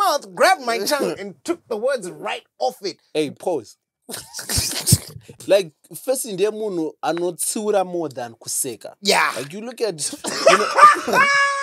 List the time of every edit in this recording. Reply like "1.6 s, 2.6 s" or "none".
5.4 s